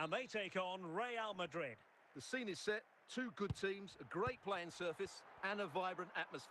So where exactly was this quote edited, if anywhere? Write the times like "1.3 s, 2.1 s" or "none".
1.9 s